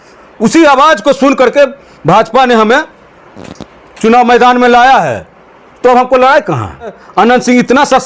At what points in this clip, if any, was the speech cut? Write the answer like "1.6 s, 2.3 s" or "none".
7.0 s